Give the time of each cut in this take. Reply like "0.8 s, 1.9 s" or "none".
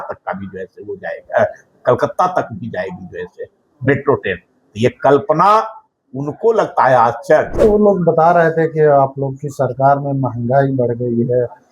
7.5 s